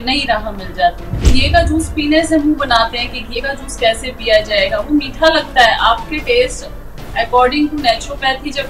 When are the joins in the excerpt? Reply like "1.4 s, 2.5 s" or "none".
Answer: 1.2 s